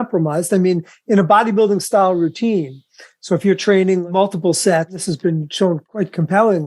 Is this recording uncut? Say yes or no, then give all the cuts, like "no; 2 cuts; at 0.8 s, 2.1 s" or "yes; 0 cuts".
no; 3 cuts; at 4.0 s, 5.0 s, 5.9 s